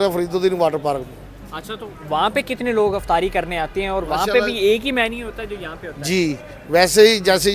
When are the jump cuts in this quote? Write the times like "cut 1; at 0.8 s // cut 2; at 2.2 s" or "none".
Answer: none